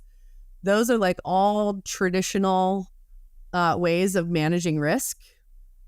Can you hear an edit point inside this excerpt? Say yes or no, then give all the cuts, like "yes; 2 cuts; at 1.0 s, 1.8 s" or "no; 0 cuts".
no; 0 cuts